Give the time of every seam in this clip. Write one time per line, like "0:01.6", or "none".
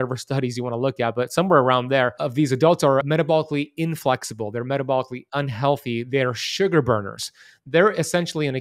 0:02.2
0:03.0